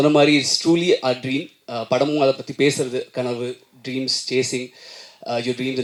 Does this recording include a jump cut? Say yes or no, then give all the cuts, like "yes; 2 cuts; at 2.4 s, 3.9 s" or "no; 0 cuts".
no; 0 cuts